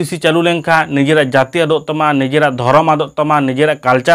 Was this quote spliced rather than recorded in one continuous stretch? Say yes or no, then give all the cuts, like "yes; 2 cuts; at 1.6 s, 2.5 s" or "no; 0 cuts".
no; 0 cuts